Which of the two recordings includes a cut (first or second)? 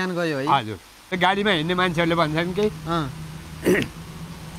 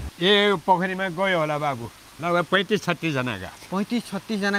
first